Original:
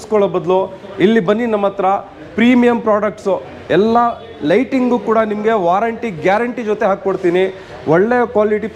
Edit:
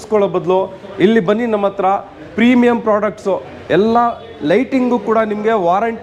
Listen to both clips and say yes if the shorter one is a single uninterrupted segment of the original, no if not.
yes